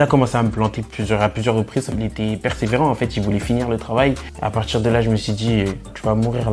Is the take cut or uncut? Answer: cut